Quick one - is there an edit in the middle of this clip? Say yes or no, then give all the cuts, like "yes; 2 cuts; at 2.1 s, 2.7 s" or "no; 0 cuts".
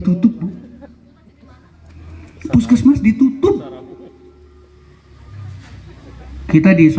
no; 0 cuts